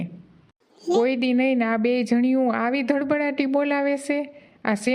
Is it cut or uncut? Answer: cut